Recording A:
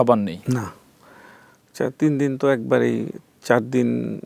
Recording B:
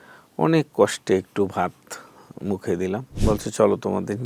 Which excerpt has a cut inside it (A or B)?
B